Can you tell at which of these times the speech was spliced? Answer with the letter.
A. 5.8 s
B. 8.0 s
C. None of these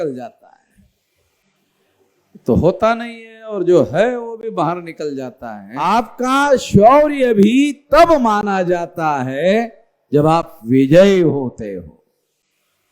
A